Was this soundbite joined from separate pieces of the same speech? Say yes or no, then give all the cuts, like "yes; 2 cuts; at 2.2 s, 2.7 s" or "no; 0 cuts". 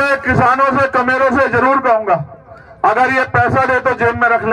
no; 0 cuts